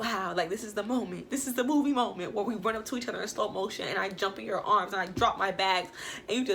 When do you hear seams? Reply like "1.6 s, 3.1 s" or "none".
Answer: none